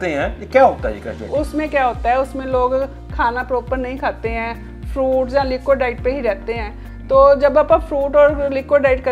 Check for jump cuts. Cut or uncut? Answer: uncut